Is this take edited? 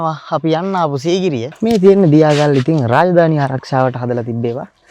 yes; 1 cut; at 1.5 s

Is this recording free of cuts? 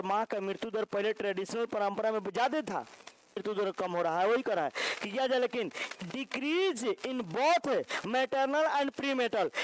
no; 1 cut; at 3.4 s

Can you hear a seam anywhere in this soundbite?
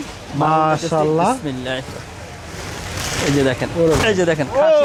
no; 0 cuts

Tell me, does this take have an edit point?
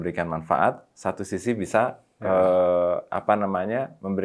no; 0 cuts

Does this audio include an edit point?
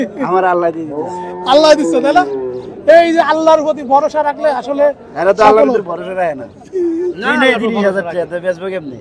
no; 0 cuts

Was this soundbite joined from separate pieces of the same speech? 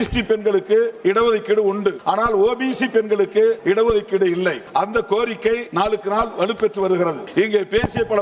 yes; 6 cuts; at 0.9 s, 2.0 s, 3.6 s, 4.6 s, 5.7 s, 7.2 s

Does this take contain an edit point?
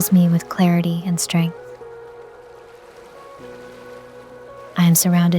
yes; 2 cuts; at 1.5 s, 4.1 s

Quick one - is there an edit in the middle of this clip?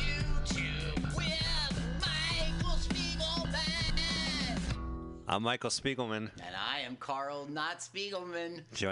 yes; 1 cut; at 5.0 s

